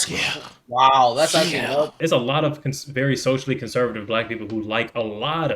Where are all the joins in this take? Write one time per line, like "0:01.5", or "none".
0:01.9